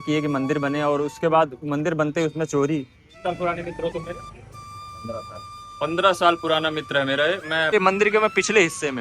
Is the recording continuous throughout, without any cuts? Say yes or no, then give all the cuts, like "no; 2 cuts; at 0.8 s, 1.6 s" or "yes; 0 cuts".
no; 2 cuts; at 3.2 s, 7.7 s